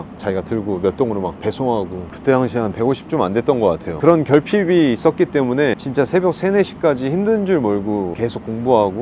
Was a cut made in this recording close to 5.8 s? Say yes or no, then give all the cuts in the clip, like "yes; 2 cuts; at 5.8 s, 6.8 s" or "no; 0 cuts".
yes; 4 cuts; at 2.0 s, 4.0 s, 5.8 s, 8.1 s